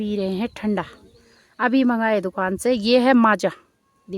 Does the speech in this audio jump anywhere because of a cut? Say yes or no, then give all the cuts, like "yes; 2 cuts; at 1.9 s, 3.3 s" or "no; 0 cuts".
no; 0 cuts